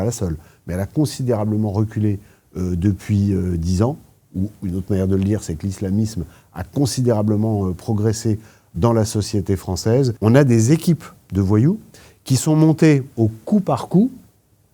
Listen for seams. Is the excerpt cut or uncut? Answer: cut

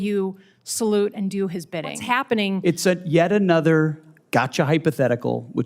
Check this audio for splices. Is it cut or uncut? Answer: cut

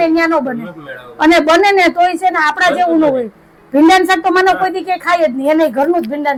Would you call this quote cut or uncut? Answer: uncut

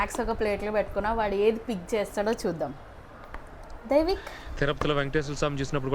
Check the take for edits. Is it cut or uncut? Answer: uncut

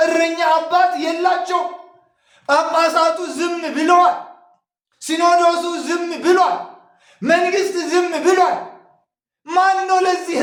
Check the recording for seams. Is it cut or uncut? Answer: uncut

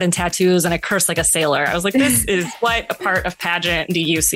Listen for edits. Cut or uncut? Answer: uncut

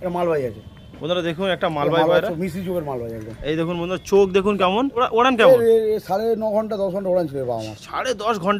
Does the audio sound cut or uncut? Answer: uncut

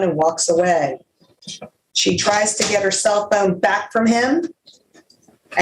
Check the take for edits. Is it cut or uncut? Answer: uncut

